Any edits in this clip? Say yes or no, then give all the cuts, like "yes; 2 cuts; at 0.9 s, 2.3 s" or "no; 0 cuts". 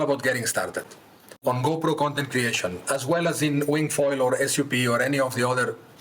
no; 0 cuts